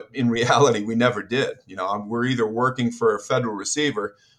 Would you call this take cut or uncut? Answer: uncut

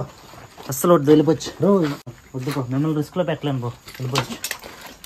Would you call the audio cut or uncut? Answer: cut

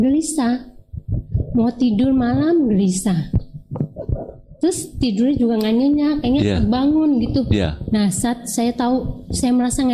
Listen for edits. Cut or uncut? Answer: uncut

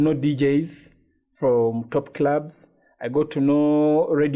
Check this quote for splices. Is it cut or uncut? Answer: uncut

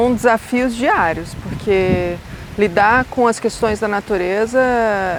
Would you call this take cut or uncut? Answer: uncut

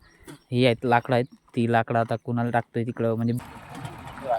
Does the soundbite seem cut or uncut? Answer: cut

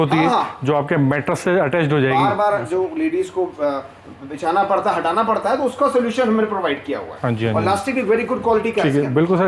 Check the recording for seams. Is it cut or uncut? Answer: uncut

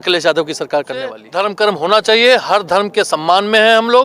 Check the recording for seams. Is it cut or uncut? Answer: cut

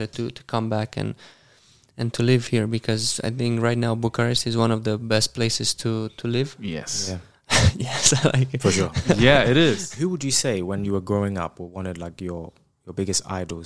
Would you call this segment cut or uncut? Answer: cut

